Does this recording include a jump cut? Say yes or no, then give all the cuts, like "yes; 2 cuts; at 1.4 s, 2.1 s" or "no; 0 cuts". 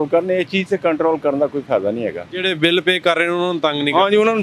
no; 0 cuts